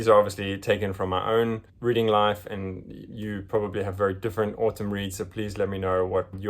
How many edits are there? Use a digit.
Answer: 1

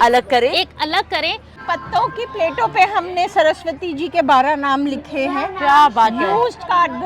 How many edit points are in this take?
1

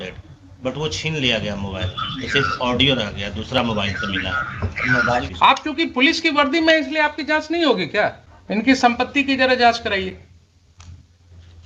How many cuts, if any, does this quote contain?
2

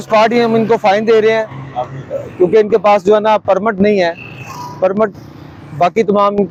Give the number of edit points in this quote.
0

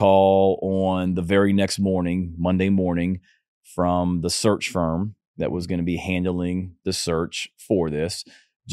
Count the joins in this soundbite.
0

